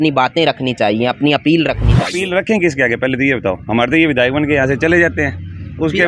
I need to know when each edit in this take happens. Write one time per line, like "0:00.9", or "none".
0:01.9